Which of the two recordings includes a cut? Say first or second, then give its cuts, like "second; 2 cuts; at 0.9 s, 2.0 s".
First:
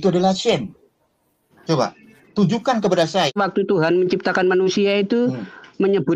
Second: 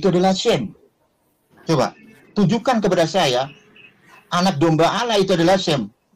first; 1 cut; at 3.3 s